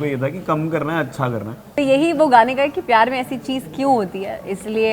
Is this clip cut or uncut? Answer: cut